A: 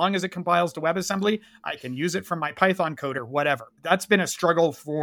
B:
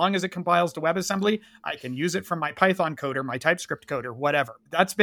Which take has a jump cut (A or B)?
A